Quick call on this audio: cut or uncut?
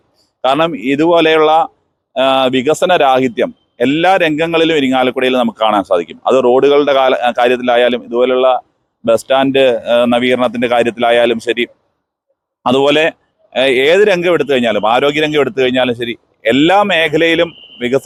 uncut